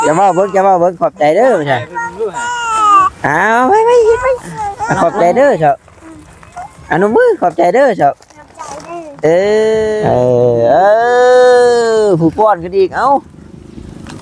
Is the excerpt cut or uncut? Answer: cut